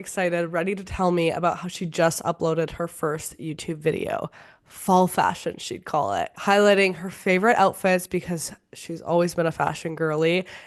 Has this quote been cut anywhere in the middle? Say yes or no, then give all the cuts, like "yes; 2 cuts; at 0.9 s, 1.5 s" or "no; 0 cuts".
no; 0 cuts